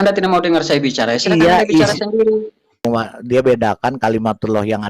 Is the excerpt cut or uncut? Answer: cut